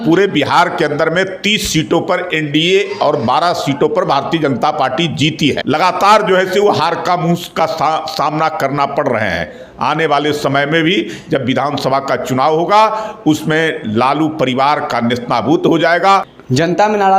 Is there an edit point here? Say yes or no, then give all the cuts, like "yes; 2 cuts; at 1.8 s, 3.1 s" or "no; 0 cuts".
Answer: yes; 2 cuts; at 5.6 s, 16.3 s